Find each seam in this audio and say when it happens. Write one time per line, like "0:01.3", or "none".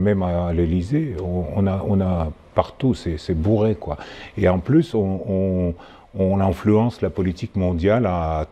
none